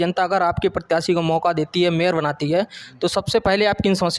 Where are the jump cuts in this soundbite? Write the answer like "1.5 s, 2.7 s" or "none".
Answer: none